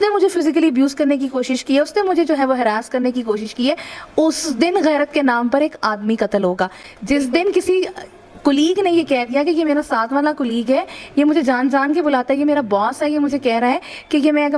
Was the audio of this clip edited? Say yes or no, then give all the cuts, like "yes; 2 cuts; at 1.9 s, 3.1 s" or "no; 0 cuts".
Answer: no; 0 cuts